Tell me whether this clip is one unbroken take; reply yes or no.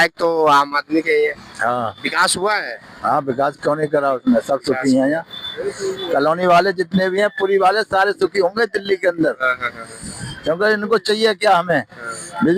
yes